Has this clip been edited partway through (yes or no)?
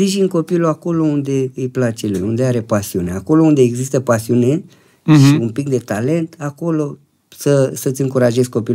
no